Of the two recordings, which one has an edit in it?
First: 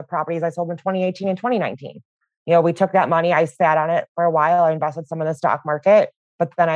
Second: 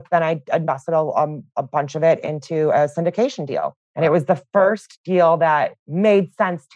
second; 3 cuts; at 1.5 s, 3.8 s, 5.8 s

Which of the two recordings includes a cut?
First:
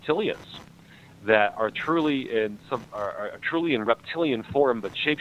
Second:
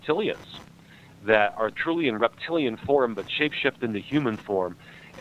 second; 1 cut; at 1.8 s

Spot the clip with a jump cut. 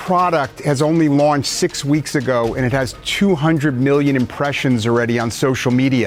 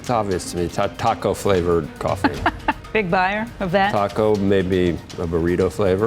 second; 2 cuts; at 1.9 s, 3.3 s

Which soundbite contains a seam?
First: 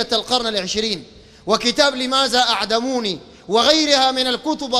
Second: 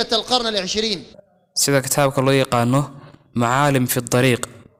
first; 1 cut; at 1.3 s

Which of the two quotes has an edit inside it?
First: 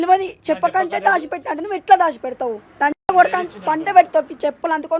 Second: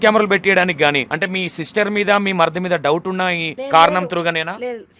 second; 2 cuts; at 1.1 s, 3.5 s

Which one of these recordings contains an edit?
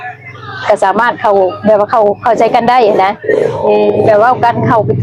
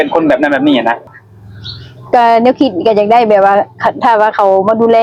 second; 1 cut; at 1.1 s

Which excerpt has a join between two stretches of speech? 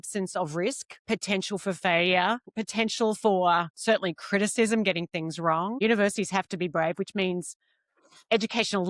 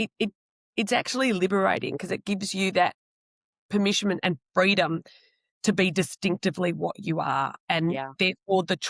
first; 4 cuts; at 1.0 s, 2.5 s, 3.7 s, 5.8 s

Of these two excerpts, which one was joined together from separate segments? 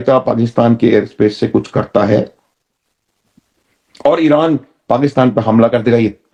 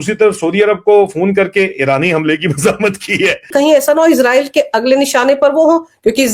second; 1 cut; at 3.5 s

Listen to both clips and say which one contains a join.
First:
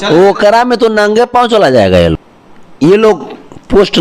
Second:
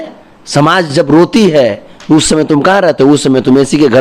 first; 1 cut; at 2.3 s

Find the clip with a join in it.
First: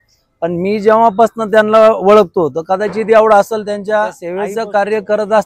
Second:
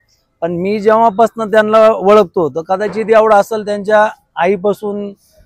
first; 1 cut; at 4.2 s

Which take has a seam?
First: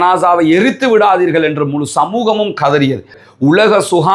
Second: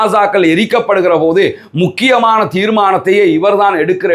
first; 1 cut; at 3.2 s

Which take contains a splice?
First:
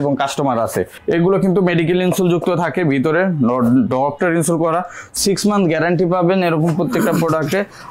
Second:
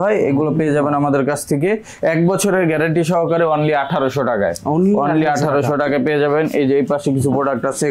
first; 2 cuts; at 0.9 s, 5.1 s

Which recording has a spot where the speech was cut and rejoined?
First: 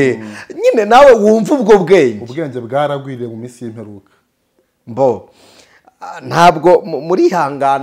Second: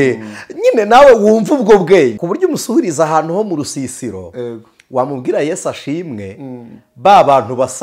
second; 1 cut; at 2.2 s

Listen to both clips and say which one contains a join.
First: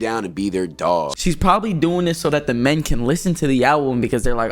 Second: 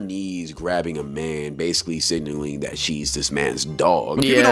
first; 1 cut; at 1.1 s

